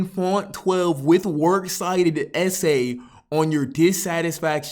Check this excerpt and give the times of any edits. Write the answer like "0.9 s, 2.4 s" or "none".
none